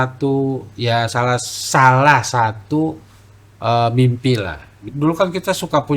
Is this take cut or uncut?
cut